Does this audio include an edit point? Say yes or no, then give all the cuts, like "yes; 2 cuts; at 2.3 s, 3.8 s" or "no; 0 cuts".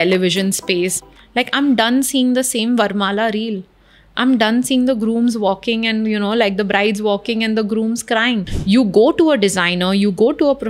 yes; 2 cuts; at 1.0 s, 8.5 s